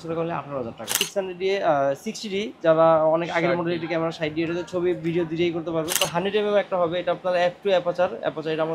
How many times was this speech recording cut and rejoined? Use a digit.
2